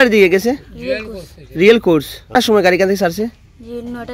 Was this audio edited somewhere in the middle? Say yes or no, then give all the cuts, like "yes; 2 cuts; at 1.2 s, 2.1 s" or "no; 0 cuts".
yes; 1 cut; at 2.3 s